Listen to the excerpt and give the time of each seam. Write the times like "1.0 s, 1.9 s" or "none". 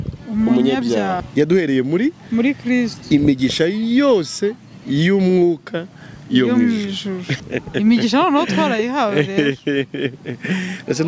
1.2 s, 7.3 s